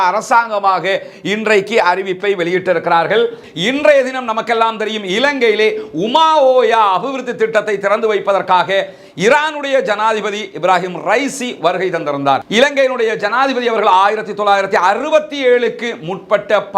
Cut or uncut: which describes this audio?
cut